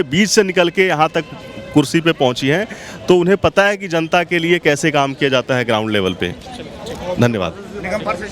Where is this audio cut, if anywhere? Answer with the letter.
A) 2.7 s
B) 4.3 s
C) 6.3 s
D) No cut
D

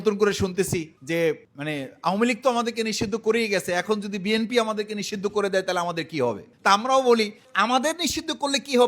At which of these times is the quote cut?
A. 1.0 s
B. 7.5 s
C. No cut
B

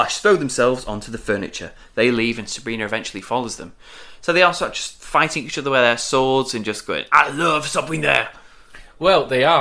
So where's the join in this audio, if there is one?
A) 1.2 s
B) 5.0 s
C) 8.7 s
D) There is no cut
D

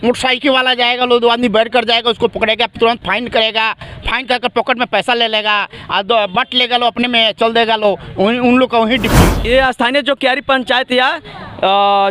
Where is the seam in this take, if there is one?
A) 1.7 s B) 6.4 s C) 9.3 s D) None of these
C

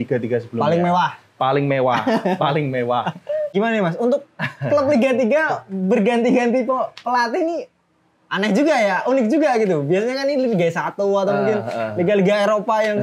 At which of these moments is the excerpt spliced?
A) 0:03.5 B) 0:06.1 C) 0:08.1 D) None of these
A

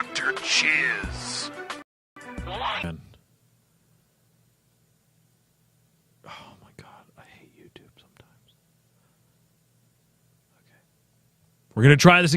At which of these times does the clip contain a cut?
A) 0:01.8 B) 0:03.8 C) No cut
A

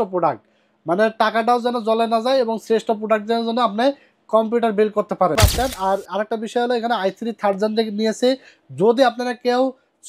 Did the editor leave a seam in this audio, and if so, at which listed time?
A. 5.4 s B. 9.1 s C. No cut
A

